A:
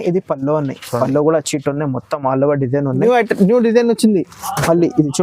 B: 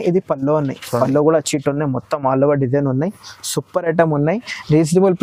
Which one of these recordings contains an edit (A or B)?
A